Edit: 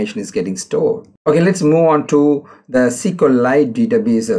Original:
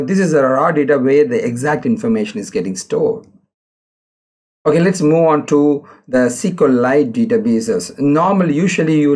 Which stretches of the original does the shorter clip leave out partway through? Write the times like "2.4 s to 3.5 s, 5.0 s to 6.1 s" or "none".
3.3 s to 4.5 s